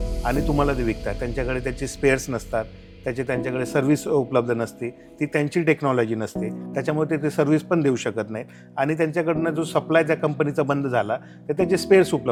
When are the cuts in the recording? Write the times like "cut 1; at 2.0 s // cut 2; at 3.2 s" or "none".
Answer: none